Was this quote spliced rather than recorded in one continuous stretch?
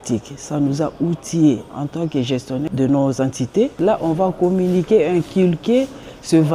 yes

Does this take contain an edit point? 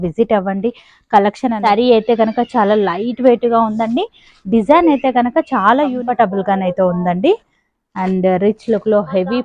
yes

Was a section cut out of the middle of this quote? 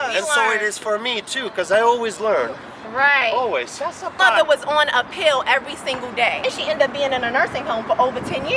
yes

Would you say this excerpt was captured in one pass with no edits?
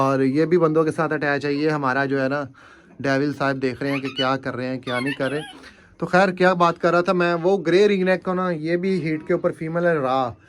yes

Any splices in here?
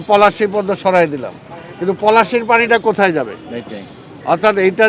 no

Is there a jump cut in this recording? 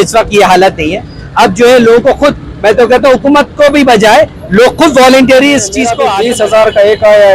yes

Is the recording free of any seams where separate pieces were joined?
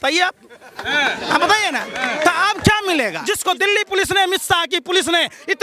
no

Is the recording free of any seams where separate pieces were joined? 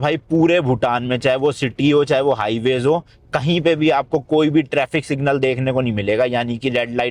yes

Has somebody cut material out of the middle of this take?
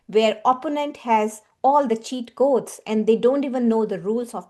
no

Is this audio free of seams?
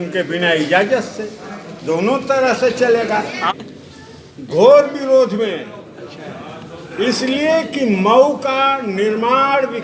no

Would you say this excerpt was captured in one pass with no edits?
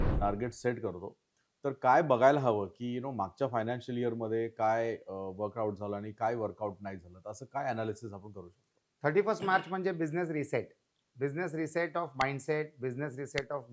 yes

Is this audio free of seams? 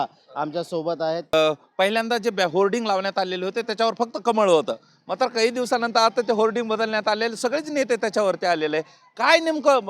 no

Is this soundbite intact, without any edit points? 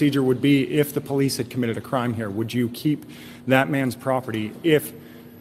yes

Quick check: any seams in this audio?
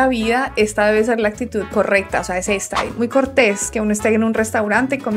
yes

